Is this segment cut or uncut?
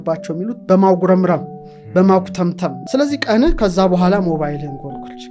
cut